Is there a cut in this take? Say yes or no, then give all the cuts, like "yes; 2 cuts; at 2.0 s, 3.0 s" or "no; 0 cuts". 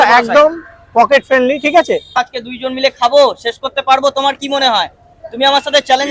yes; 1 cut; at 2.1 s